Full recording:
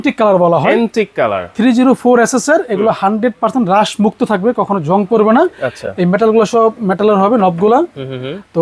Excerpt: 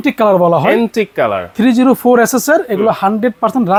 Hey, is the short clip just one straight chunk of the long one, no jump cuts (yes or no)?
yes